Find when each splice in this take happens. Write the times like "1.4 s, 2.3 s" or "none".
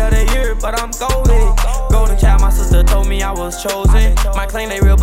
none